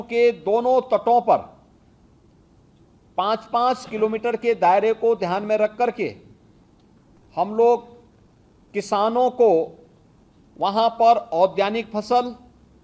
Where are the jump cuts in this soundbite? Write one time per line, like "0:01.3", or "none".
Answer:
none